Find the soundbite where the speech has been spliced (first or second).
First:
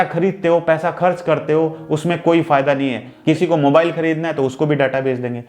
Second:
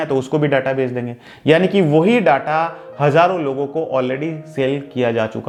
first